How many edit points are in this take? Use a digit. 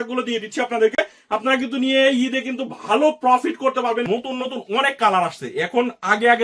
1